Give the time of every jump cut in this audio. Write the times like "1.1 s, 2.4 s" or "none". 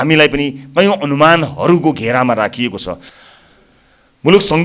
3.1 s